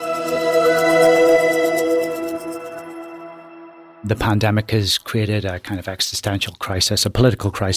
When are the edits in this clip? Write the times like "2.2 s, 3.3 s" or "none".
4.1 s

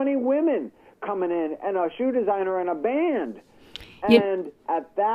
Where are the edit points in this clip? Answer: 0.9 s

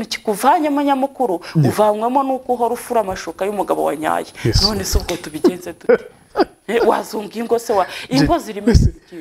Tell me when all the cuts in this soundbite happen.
none

